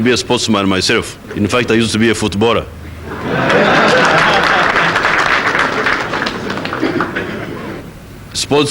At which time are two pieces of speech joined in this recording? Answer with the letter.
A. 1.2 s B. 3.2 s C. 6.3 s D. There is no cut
A